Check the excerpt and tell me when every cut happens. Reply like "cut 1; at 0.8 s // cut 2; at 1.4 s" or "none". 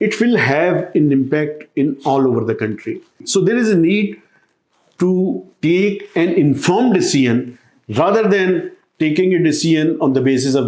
cut 1; at 3.2 s